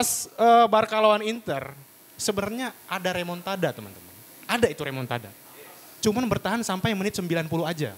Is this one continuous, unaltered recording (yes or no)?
yes